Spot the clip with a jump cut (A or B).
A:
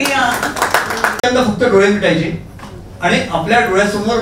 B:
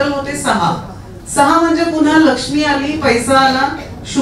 A